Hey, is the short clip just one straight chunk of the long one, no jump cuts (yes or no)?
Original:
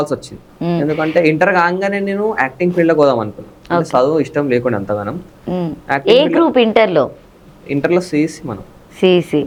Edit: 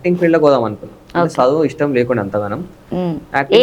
yes